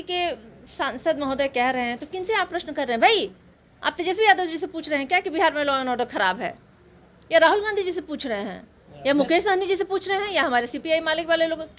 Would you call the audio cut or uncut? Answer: uncut